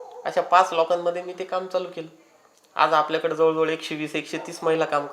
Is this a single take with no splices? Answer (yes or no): yes